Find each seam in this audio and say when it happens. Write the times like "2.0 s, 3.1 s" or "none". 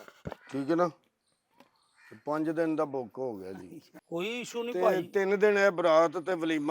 3.9 s

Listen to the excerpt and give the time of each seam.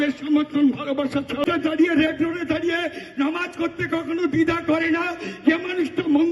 1.4 s

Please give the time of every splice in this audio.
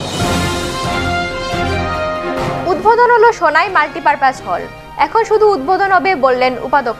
1.8 s

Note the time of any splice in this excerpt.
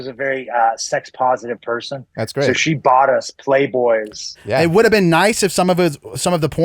4.4 s

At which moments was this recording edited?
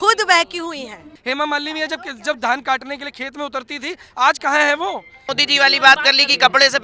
1.1 s, 5.3 s

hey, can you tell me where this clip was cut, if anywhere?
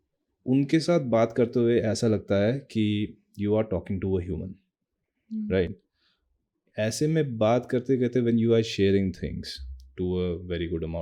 none

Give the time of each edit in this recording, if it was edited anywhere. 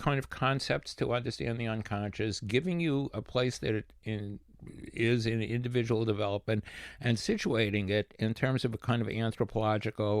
none

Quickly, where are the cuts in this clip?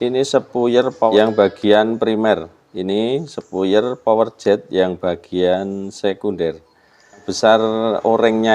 1.1 s, 7.3 s

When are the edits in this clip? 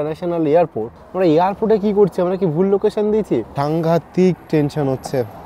1.0 s, 3.5 s

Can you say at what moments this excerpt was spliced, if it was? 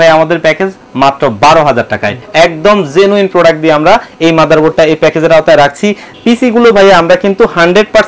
2.2 s, 6.1 s

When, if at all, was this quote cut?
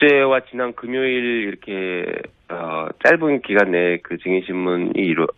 1.8 s

